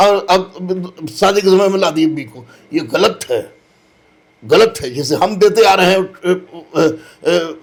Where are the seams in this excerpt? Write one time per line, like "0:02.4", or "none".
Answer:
none